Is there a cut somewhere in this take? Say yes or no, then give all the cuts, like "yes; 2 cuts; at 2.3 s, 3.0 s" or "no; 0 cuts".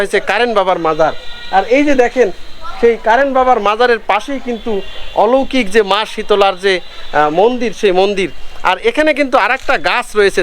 no; 0 cuts